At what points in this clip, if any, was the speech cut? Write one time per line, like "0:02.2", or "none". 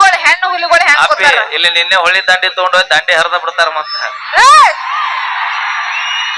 none